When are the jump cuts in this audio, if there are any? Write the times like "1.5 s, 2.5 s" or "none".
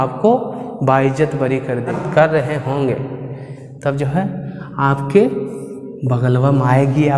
1.9 s